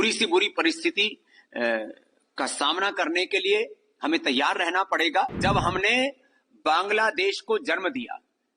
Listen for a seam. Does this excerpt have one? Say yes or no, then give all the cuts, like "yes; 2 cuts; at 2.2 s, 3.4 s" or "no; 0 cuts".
yes; 1 cut; at 5.4 s